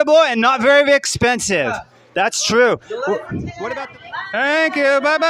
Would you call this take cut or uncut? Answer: cut